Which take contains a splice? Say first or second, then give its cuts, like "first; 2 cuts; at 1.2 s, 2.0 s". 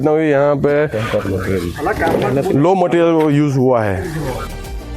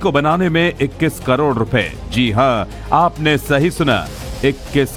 first; 1 cut; at 1.7 s